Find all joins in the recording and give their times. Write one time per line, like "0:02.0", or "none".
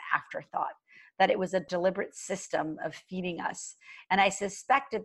0:01.7